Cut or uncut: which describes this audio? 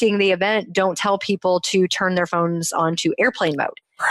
uncut